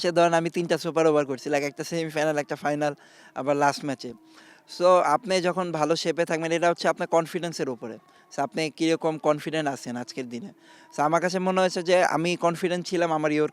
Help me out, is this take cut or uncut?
uncut